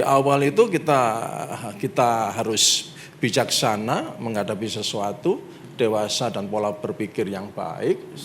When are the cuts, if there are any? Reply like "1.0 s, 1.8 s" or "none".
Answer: none